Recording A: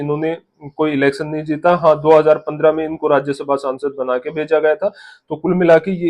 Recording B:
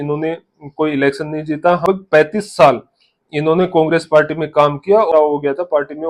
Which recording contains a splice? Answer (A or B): B